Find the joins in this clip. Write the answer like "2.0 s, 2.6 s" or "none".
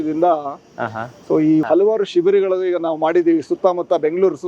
1.6 s